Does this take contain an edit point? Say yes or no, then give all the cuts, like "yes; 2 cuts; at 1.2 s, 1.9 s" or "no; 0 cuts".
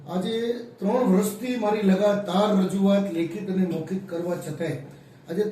no; 0 cuts